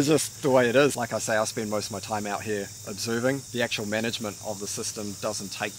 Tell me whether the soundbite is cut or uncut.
cut